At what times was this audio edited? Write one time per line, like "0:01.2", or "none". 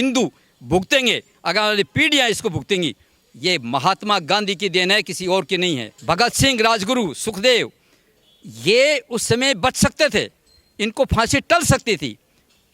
0:05.9